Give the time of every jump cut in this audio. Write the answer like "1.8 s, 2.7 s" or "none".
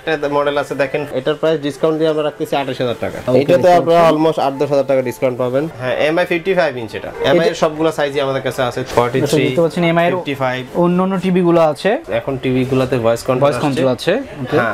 1.1 s, 3.2 s, 5.7 s, 8.8 s, 12.0 s